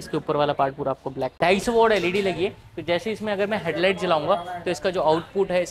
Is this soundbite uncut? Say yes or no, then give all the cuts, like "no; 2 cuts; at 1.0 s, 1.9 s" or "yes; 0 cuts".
no; 1 cut; at 1.3 s